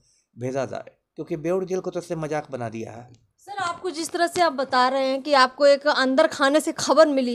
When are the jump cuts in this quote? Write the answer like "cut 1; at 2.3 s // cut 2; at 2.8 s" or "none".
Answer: none